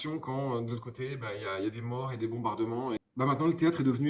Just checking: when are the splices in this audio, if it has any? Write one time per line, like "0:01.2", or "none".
0:03.0

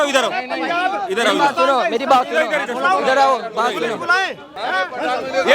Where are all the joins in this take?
0:04.6

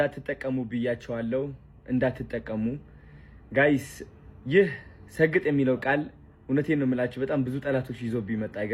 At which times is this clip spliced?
none

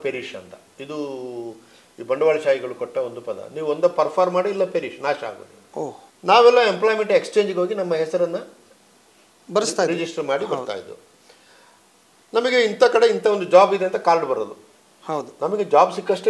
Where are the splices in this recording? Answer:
0:06.1

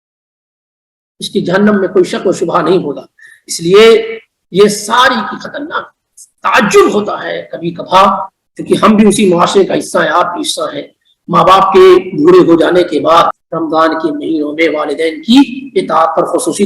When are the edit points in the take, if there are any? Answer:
0:13.4

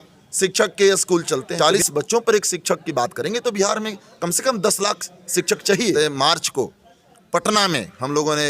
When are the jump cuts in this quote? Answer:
0:01.5
0:05.9

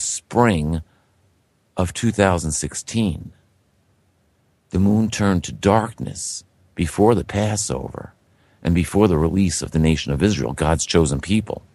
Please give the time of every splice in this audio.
0:10.4

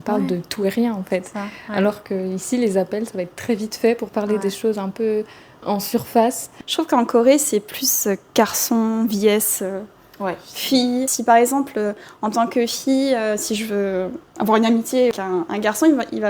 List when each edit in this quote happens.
0:06.6
0:11.1
0:15.1

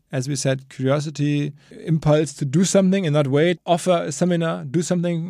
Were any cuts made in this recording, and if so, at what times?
0:01.7
0:03.6

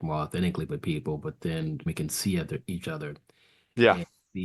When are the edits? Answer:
0:01.9

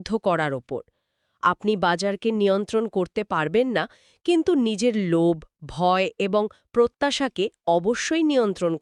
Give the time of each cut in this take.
none

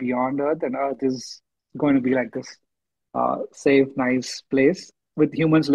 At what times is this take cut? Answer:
none

